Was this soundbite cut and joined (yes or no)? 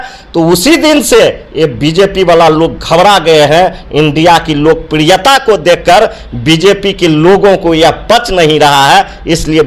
no